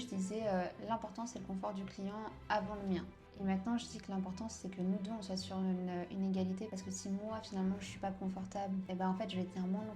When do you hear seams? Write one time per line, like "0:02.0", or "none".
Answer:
none